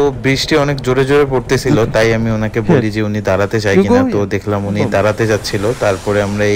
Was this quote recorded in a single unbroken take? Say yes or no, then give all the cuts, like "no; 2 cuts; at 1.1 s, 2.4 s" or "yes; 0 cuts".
yes; 0 cuts